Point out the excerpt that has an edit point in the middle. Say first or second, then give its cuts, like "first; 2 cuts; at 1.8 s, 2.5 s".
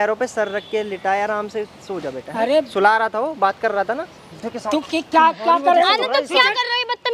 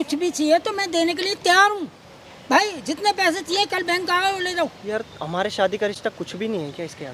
first; 1 cut; at 4.3 s